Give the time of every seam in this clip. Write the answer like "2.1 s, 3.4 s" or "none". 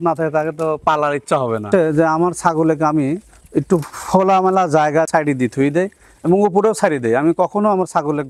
1.7 s, 5.1 s